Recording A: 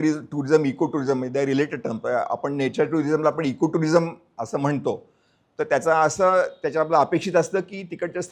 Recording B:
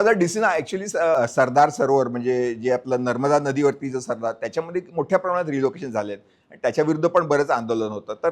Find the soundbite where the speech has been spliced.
B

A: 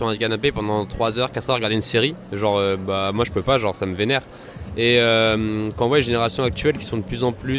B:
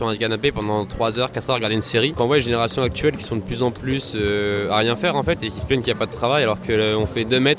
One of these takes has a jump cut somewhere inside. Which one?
B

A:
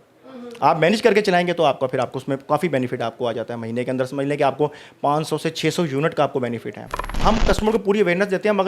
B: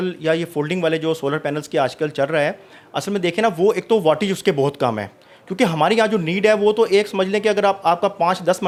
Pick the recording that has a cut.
A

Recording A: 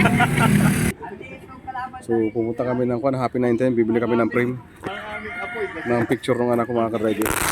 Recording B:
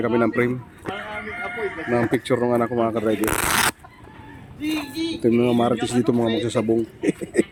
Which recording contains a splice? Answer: A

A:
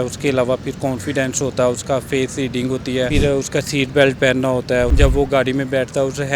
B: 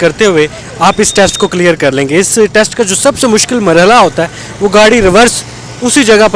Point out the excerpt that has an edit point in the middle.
A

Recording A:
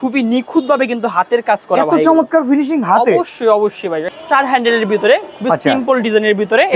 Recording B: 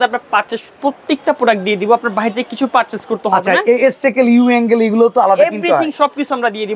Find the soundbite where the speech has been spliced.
A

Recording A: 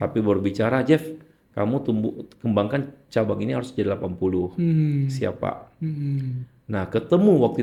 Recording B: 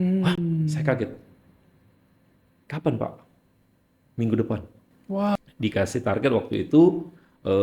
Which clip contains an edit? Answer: B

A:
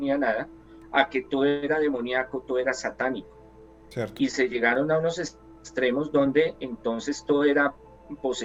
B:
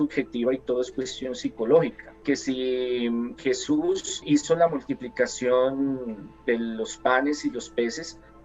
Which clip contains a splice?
B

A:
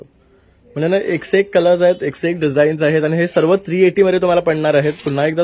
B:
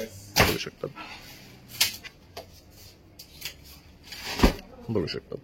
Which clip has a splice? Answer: B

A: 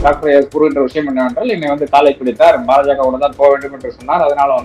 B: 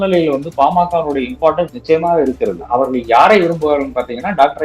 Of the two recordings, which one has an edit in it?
B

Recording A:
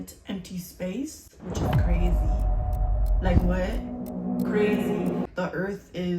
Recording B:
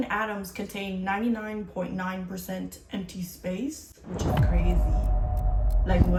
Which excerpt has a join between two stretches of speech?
A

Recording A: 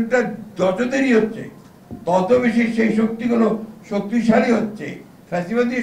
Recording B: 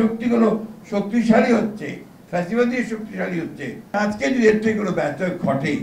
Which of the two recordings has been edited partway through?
B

